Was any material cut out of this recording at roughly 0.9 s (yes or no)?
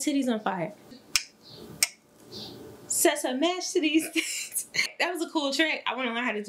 yes